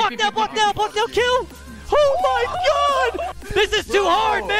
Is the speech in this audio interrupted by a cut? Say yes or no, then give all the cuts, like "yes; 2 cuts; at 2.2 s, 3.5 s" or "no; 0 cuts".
yes; 1 cut; at 3.3 s